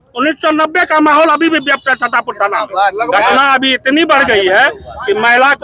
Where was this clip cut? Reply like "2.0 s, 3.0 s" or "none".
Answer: 3.1 s